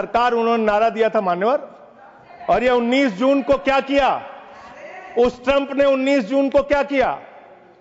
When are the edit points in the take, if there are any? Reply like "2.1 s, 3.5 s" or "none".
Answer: none